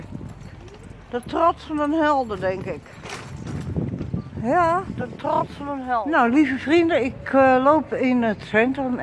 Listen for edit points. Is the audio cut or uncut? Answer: cut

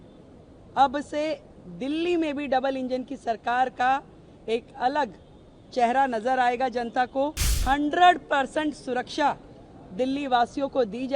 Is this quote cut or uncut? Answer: cut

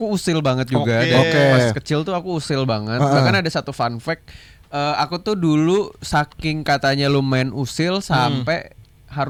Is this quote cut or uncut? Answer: uncut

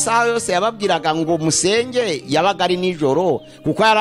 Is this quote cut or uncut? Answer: uncut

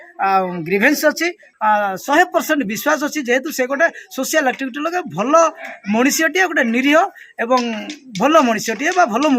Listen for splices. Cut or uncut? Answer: cut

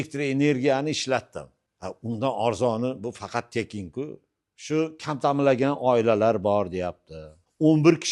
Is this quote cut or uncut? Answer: cut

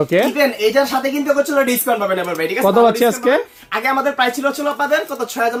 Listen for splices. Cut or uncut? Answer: uncut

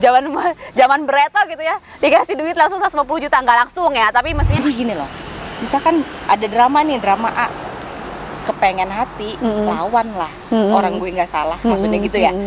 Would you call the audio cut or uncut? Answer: cut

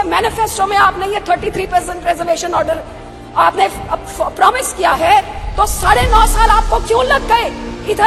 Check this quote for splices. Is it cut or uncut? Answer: uncut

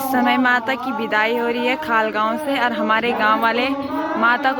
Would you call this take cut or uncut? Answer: uncut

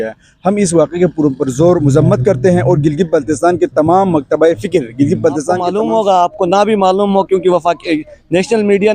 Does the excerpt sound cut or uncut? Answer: cut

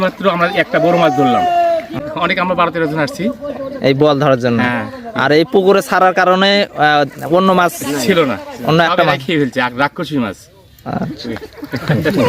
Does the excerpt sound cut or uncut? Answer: cut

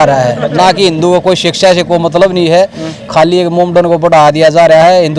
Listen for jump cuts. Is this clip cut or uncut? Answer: uncut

